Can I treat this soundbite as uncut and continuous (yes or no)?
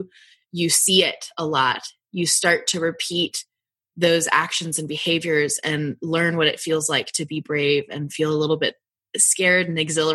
yes